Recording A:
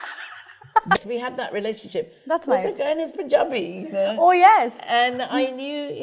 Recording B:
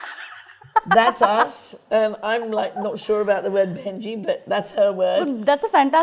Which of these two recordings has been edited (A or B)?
A